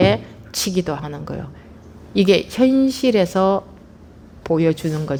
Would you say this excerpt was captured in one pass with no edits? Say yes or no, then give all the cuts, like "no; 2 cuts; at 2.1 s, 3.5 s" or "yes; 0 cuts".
yes; 0 cuts